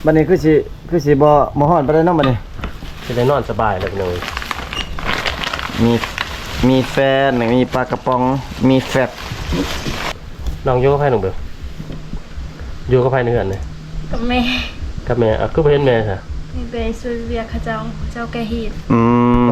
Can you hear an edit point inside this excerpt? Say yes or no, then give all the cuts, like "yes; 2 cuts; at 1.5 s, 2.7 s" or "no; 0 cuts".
yes; 1 cut; at 10.1 s